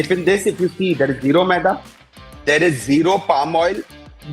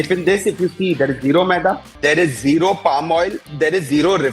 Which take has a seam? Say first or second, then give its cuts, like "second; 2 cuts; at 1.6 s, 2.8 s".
second; 2 cuts; at 1.9 s, 3.4 s